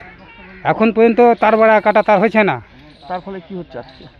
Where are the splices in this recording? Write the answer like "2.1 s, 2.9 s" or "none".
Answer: none